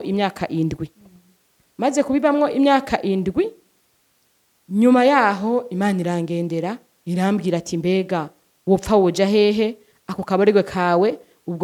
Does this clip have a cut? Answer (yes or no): no